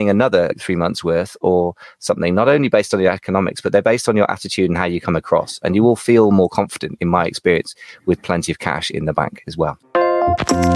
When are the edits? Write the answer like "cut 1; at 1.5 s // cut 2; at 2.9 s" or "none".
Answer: cut 1; at 9.8 s